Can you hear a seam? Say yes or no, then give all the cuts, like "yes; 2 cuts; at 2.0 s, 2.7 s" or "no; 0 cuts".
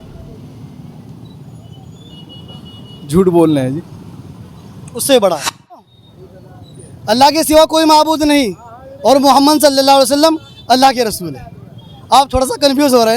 yes; 1 cut; at 5.8 s